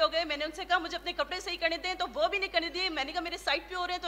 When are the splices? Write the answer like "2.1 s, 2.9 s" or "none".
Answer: none